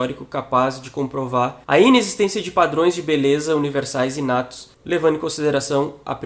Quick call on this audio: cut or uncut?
uncut